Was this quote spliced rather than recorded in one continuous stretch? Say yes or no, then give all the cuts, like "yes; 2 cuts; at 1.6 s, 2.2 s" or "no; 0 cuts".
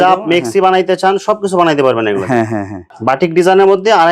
yes; 1 cut; at 2.8 s